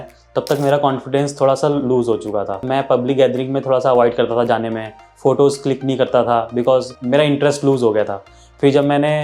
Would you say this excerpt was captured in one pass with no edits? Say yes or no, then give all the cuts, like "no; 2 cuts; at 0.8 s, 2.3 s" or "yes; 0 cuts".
no; 2 cuts; at 2.6 s, 7.0 s